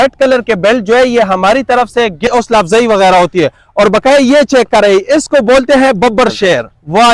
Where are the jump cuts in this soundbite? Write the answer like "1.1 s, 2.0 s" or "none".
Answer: 2.3 s